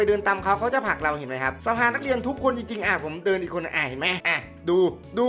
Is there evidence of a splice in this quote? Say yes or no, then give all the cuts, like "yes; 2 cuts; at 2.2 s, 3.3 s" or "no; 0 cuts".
yes; 2 cuts; at 1.5 s, 4.2 s